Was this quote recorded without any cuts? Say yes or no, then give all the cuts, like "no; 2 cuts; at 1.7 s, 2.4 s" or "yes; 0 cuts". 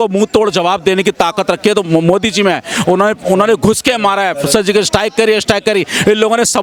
yes; 0 cuts